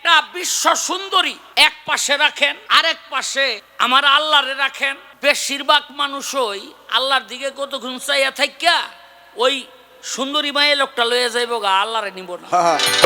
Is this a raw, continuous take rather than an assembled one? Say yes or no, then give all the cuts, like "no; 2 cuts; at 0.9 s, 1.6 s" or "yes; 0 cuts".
no; 4 cuts; at 1.4 s, 2.6 s, 3.7 s, 5.0 s